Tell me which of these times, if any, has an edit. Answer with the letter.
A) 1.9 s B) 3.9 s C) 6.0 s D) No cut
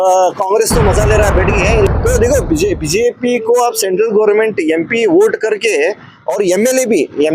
A